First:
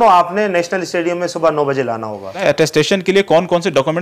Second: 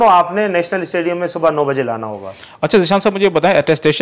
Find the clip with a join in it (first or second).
first